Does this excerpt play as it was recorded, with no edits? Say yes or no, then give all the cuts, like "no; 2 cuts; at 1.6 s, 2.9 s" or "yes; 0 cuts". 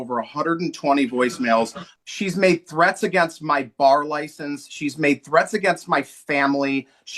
no; 1 cut; at 1.8 s